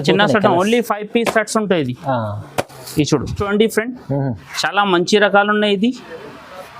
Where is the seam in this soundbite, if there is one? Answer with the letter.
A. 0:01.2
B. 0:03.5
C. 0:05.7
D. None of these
B